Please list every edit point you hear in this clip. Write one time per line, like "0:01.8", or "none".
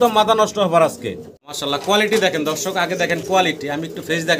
0:01.4